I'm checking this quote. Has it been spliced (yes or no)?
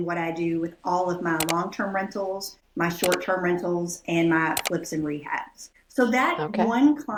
no